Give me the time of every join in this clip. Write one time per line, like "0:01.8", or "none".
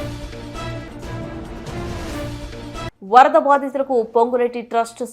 0:02.9